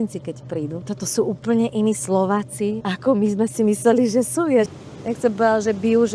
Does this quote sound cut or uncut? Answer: cut